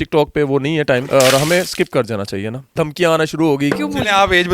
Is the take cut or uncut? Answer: cut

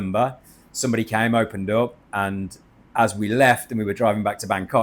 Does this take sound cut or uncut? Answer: uncut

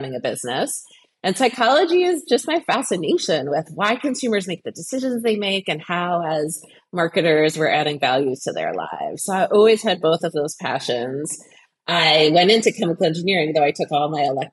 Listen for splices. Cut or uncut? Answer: uncut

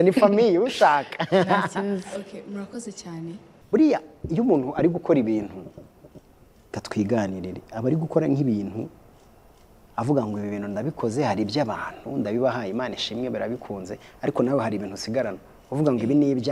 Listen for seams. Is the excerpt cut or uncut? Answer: cut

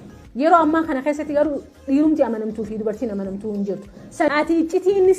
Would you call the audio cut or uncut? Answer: cut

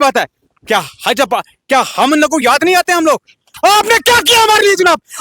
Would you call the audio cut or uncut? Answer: cut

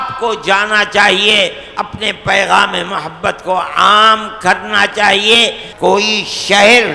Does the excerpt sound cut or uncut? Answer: cut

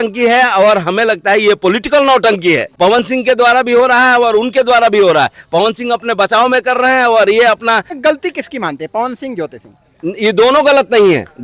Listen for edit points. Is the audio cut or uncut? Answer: cut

